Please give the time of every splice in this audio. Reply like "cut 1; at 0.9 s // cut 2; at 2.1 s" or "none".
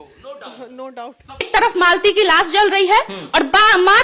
cut 1; at 1.5 s